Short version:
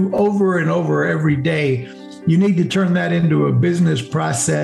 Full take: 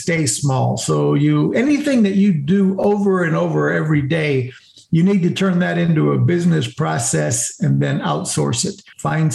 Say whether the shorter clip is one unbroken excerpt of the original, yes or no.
yes